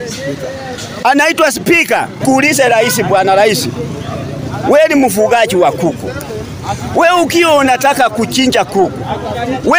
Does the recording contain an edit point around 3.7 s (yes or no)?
no